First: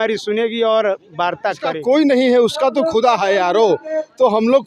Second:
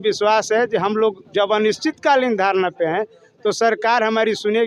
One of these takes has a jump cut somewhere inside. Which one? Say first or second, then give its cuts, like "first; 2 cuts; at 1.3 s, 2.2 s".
first; 1 cut; at 1.7 s